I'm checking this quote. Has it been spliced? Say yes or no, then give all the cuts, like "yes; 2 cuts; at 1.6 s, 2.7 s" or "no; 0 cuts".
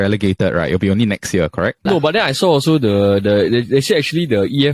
yes; 1 cut; at 1.8 s